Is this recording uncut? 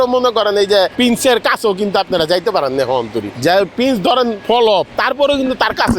no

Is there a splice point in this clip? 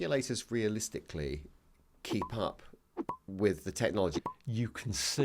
yes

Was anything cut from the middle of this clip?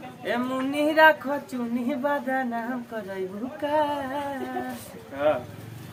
no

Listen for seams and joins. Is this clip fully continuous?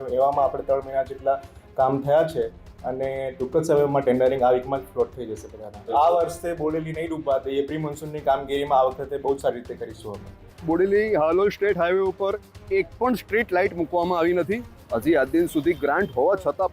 no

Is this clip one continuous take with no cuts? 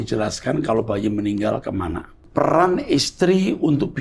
no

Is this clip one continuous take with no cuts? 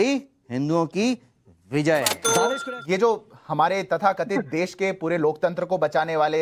yes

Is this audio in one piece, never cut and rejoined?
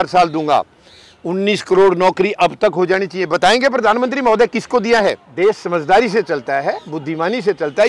no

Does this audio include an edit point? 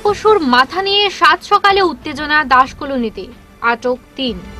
no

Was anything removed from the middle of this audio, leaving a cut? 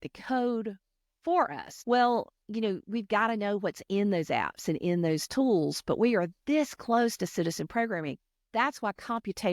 yes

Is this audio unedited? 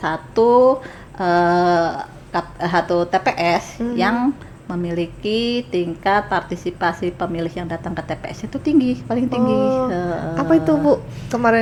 yes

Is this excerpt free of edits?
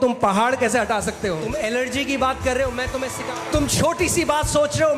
no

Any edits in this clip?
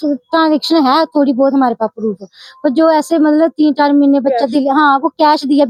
no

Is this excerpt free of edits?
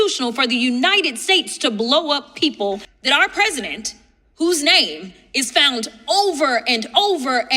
no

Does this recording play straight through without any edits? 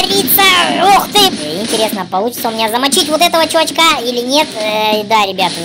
no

